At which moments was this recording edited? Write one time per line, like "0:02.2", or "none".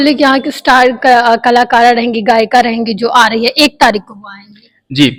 none